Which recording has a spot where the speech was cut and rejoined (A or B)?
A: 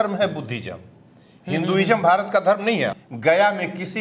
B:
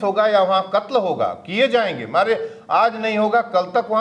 A